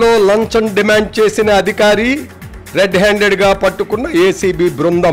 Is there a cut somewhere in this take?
no; 0 cuts

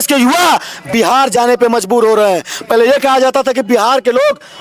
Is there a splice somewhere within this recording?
no; 0 cuts

